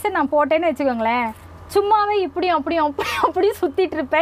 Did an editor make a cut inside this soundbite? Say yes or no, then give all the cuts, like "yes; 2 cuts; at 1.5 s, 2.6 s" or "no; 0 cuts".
no; 0 cuts